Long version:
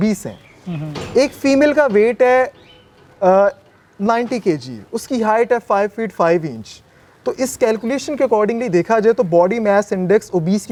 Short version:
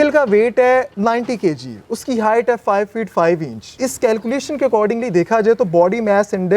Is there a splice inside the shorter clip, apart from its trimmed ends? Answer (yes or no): yes